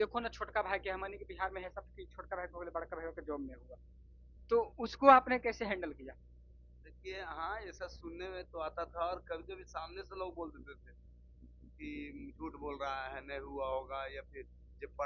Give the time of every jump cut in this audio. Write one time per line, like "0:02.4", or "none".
none